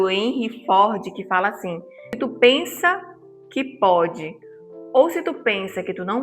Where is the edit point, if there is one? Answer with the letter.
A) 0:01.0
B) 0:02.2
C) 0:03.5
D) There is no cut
B